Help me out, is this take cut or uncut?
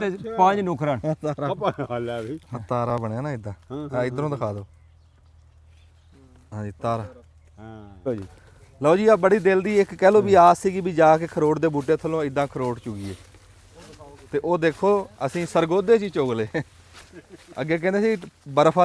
cut